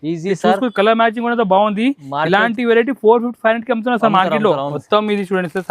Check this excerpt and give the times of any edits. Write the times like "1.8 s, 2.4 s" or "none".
4.8 s